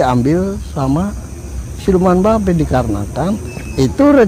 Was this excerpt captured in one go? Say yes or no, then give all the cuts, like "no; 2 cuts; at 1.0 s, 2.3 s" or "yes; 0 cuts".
yes; 0 cuts